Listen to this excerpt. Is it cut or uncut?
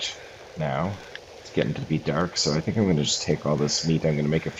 cut